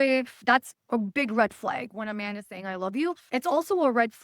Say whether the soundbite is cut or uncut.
cut